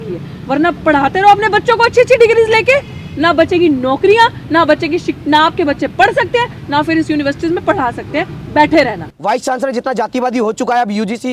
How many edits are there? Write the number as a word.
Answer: one